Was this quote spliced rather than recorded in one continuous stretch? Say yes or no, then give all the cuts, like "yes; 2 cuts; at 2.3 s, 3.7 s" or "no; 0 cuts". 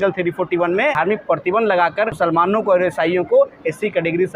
yes; 2 cuts; at 0.9 s, 2.1 s